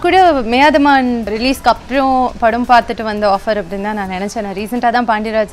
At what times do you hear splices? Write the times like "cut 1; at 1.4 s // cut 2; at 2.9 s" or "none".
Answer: cut 1; at 1.3 s